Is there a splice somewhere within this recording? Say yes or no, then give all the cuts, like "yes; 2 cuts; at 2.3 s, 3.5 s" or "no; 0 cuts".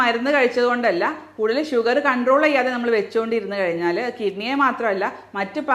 no; 0 cuts